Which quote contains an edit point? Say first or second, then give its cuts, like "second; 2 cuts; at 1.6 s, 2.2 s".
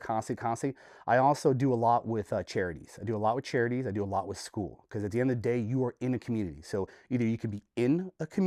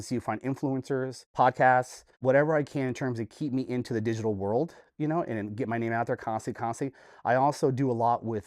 second; 2 cuts; at 1.2 s, 2.0 s